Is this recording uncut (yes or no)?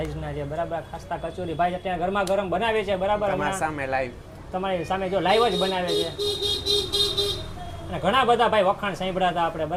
yes